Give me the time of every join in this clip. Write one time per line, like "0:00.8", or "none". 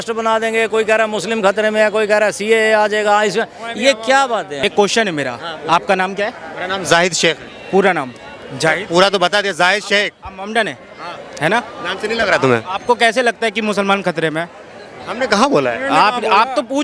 0:04.5